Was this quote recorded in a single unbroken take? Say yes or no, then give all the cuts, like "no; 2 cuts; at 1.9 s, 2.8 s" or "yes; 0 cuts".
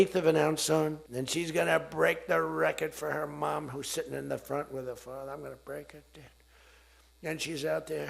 no; 1 cut; at 1.1 s